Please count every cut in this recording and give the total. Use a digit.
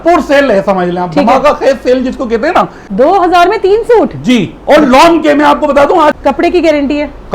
2